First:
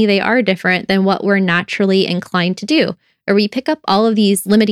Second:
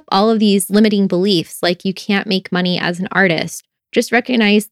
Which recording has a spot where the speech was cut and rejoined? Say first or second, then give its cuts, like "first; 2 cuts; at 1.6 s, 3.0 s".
second; 1 cut; at 3.7 s